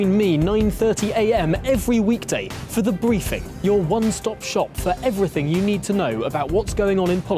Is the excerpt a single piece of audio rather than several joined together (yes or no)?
yes